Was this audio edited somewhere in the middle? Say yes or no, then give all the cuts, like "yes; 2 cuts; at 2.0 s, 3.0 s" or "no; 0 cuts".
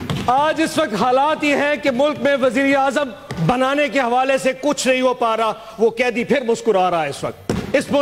no; 0 cuts